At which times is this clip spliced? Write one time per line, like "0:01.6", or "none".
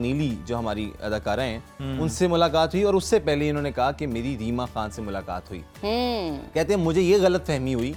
none